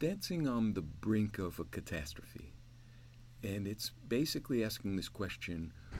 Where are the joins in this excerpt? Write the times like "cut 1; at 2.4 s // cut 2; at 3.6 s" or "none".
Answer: none